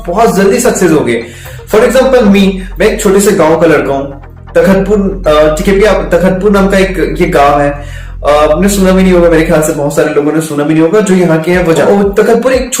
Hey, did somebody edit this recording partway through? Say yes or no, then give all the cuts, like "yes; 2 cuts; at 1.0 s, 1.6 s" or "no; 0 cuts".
no; 0 cuts